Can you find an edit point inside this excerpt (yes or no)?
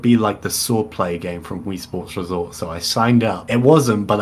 no